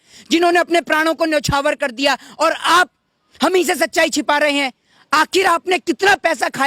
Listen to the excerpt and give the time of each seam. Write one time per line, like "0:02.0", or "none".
none